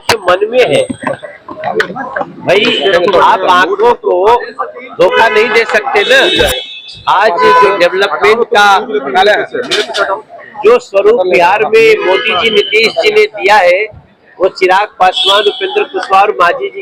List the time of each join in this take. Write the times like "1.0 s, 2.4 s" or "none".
none